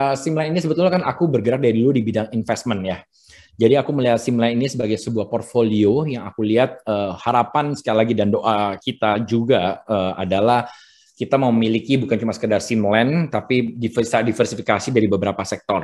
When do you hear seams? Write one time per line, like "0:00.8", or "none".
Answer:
none